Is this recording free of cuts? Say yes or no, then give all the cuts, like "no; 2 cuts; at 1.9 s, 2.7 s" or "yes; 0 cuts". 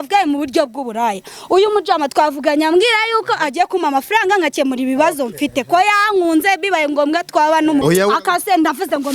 no; 1 cut; at 7.8 s